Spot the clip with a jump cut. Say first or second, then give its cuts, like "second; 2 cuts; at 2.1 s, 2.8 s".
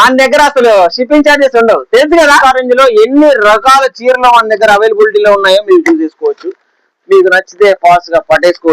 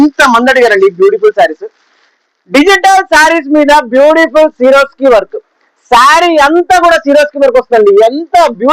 first; 1 cut; at 2.4 s